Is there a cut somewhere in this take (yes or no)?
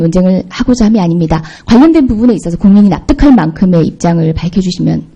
no